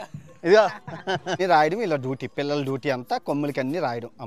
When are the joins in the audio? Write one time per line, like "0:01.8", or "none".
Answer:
0:01.4